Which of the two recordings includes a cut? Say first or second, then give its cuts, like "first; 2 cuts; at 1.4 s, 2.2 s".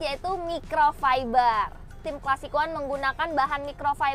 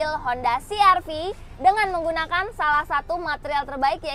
first; 1 cut; at 2.0 s